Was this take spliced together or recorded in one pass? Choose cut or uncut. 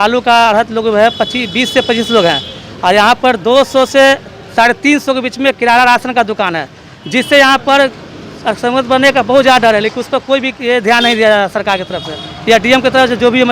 uncut